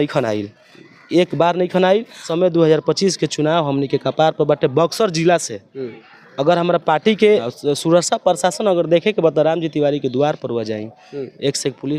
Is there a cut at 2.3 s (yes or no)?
yes